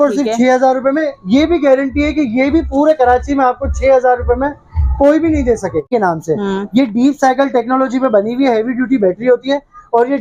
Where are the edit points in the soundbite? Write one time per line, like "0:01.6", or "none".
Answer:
0:05.9